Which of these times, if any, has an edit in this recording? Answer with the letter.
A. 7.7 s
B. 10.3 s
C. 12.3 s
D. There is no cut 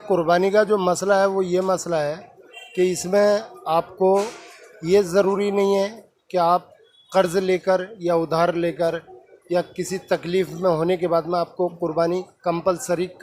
D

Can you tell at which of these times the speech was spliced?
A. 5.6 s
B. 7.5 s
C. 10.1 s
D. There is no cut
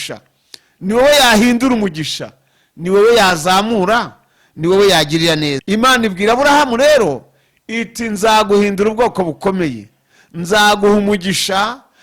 A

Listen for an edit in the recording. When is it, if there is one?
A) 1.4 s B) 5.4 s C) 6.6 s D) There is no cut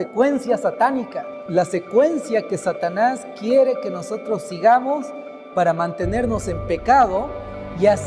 A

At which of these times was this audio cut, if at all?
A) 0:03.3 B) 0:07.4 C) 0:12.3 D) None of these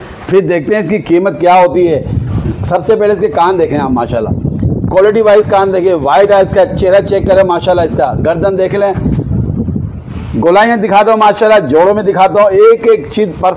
D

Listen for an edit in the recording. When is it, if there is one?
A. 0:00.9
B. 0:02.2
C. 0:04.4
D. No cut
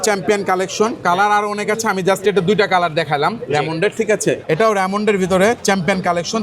C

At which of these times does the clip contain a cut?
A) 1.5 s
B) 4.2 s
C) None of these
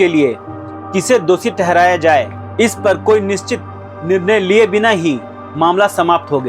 C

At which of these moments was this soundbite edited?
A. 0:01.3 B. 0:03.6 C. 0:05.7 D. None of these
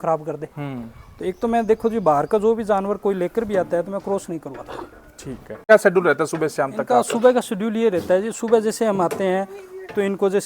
C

